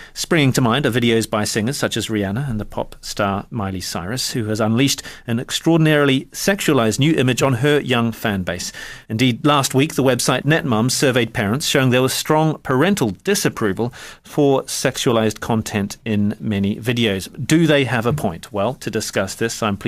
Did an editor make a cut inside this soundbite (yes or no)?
yes